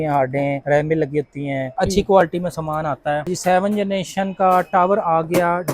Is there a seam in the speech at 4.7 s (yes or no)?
no